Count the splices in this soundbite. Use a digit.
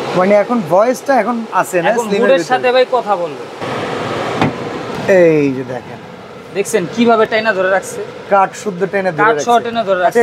2